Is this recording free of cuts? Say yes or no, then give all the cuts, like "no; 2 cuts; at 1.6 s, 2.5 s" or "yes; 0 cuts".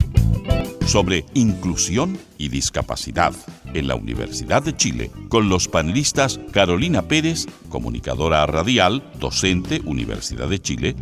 no; 1 cut; at 0.9 s